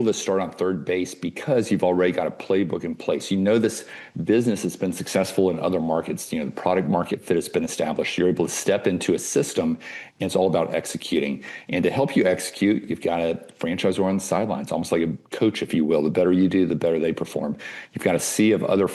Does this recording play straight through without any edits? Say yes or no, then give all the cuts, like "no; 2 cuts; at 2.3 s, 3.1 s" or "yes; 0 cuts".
yes; 0 cuts